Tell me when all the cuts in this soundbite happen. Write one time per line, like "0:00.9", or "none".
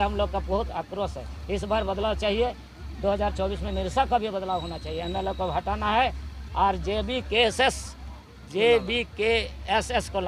none